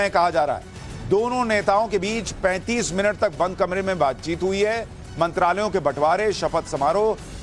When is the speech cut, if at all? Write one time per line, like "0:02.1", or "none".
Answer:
none